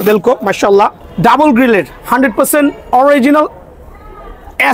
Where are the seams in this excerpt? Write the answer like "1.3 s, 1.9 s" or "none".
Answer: 1.0 s